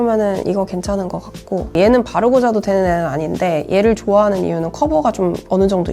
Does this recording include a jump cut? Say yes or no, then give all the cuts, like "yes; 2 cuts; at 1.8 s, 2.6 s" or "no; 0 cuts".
yes; 1 cut; at 1.7 s